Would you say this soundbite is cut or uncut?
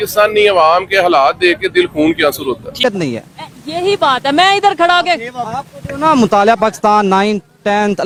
uncut